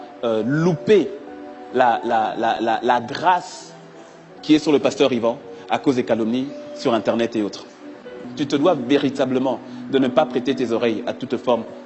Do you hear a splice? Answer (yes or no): yes